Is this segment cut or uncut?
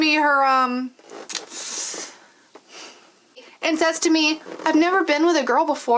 cut